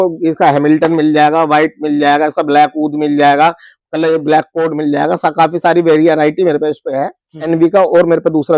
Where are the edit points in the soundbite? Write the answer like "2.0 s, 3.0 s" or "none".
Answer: 7.4 s